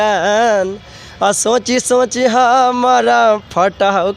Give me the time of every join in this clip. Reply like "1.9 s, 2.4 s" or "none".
none

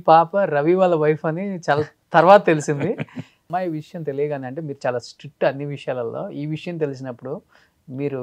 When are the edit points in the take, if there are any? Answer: 3.5 s

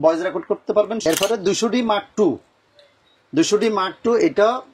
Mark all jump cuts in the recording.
1.0 s

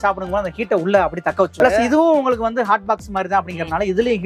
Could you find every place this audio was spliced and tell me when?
1.5 s

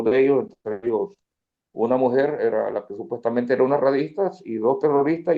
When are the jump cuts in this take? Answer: none

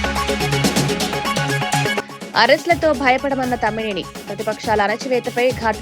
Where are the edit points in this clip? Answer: 1.9 s

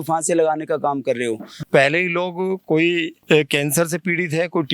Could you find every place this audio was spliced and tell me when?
1.5 s, 3.1 s

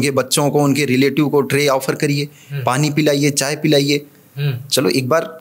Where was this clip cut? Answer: none

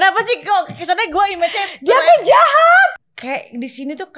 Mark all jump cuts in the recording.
3.0 s

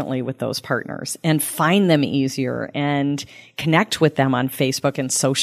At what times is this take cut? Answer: none

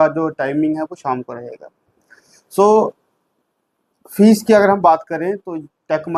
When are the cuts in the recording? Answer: none

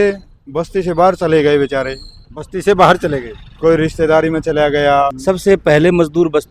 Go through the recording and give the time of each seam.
5.2 s

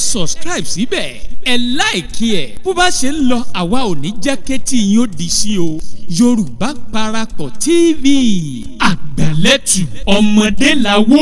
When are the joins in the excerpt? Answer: none

